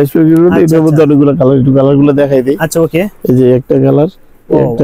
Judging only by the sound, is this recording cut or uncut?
uncut